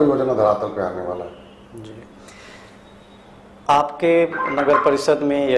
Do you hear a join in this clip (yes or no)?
no